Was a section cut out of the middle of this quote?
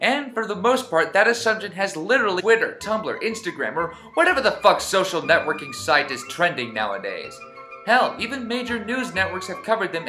no; 0 cuts

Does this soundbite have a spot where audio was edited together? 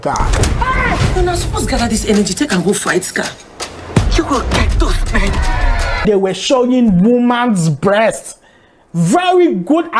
yes; 1 cut; at 6.0 s

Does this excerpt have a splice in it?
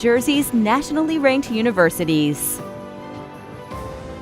yes; 1 cut; at 2.4 s

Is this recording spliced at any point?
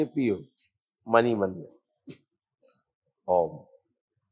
no; 0 cuts

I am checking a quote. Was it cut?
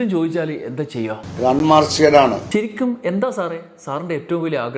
yes; 2 cuts; at 1.2 s, 2.4 s

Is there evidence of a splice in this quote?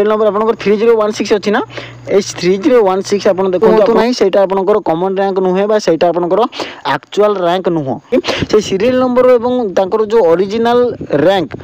yes; 2 cuts; at 3.7 s, 8.1 s

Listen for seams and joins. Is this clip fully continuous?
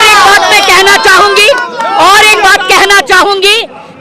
yes; 0 cuts

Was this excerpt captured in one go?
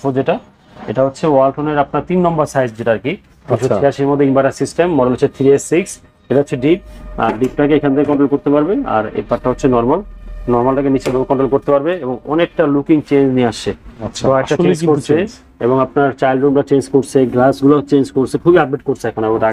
yes; 0 cuts

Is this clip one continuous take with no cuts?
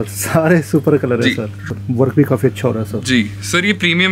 no; 1 cut; at 1.6 s

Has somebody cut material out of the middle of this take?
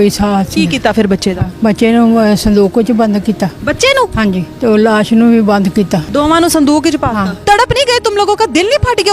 yes; 4 cuts; at 1.5 s, 4.2 s, 6.0 s, 7.3 s

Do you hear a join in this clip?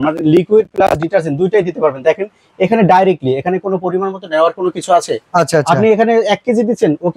no; 0 cuts

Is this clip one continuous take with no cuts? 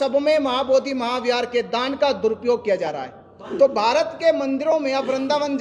no; 1 cut; at 3.4 s

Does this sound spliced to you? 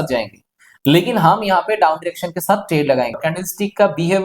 yes; 1 cut; at 3.2 s

